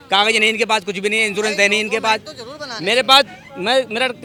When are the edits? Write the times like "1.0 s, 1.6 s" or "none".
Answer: none